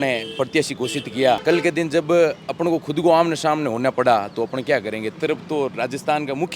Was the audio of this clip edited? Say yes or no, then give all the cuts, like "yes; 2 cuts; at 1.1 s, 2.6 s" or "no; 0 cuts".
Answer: yes; 2 cuts; at 1.4 s, 5.2 s